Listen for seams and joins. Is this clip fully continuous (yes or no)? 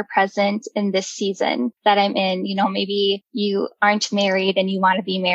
no